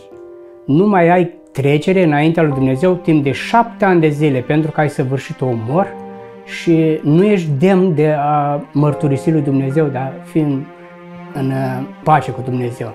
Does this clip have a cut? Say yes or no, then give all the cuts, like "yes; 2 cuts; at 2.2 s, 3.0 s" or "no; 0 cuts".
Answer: yes; 1 cut; at 12.0 s